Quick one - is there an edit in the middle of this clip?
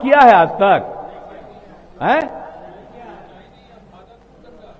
no; 0 cuts

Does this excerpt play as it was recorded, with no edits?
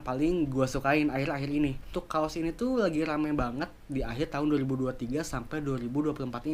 no; 1 cut; at 2.0 s

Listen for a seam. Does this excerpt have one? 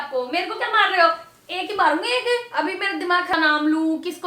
yes; 1 cut; at 3.3 s

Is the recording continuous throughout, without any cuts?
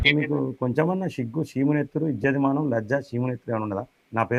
yes; 0 cuts

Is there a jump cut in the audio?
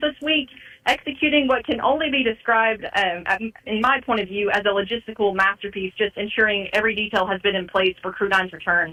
no; 0 cuts

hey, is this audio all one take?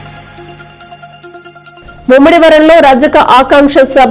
no; 1 cut; at 1.3 s

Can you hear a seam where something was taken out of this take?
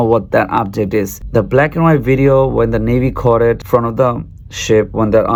no; 0 cuts

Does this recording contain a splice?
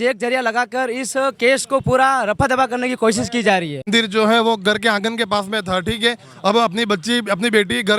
yes; 1 cut; at 3.9 s

